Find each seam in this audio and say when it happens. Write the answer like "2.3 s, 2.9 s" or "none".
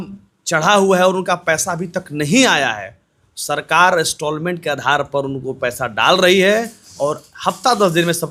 none